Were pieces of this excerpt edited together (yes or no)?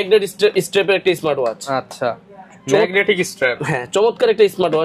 no